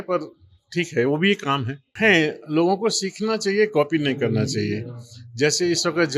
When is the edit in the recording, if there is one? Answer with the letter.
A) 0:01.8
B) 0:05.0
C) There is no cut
A